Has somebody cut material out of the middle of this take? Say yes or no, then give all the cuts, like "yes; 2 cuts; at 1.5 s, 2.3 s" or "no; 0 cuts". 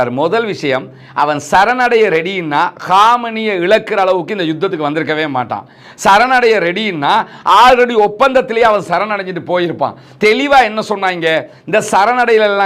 no; 0 cuts